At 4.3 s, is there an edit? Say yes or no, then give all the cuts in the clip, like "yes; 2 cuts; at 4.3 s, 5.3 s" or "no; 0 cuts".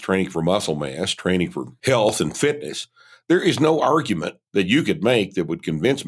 no; 1 cut; at 1.7 s